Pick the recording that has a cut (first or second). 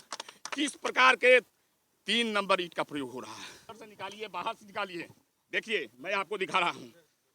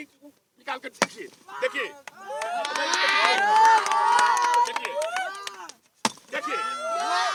first